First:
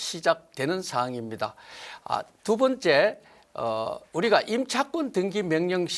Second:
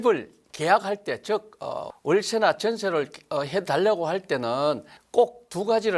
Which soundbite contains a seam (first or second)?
second